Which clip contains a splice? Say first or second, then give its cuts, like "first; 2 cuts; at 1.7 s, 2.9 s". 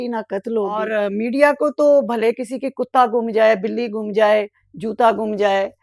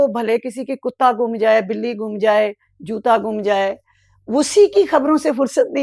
first; 1 cut; at 0.9 s